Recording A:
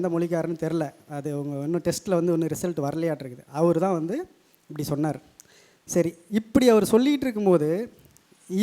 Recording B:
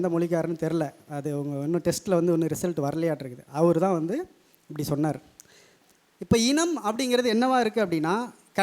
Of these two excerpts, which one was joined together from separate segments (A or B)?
B